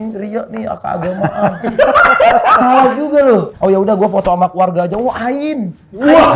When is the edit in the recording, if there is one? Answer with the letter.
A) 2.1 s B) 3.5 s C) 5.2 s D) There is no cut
B